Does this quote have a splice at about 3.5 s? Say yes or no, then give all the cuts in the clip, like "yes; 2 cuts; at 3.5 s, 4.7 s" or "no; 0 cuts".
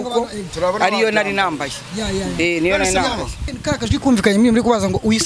yes; 1 cut; at 3.5 s